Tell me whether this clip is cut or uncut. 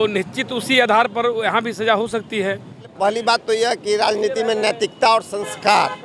cut